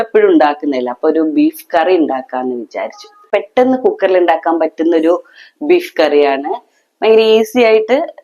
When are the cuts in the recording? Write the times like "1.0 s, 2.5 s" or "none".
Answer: 3.2 s